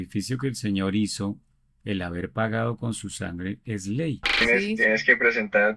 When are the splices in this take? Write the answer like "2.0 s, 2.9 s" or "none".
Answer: 4.4 s